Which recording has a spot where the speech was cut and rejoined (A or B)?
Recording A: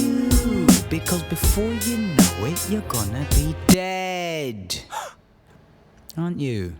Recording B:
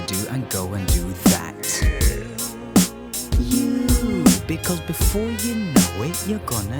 A